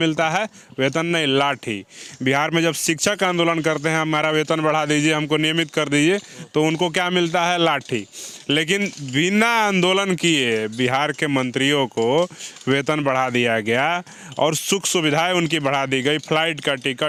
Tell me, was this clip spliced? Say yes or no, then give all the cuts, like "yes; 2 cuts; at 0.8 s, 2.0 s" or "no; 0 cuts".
no; 0 cuts